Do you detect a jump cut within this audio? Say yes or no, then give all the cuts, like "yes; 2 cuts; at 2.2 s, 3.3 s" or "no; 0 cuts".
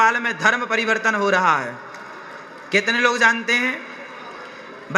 no; 0 cuts